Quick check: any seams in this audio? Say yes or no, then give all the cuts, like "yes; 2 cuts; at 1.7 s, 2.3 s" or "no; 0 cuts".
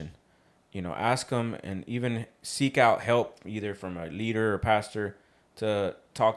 no; 0 cuts